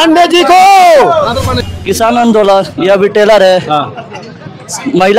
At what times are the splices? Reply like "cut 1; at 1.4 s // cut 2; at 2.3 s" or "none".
cut 1; at 1.5 s